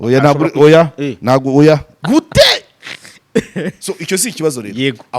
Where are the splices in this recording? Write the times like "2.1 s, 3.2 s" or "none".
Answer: 1.9 s